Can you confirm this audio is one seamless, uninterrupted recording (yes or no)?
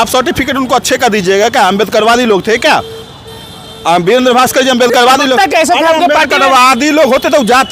yes